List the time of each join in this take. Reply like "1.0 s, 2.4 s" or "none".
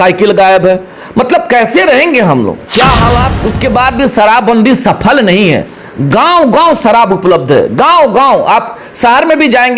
3.4 s